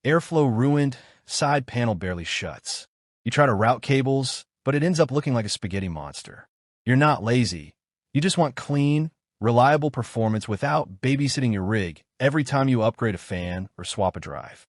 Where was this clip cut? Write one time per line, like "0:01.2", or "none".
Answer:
none